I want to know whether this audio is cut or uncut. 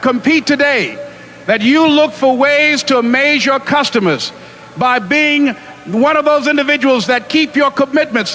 uncut